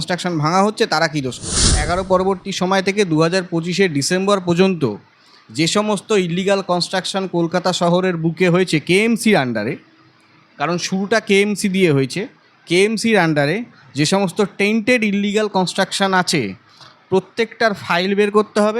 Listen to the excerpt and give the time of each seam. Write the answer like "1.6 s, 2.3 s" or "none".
1.8 s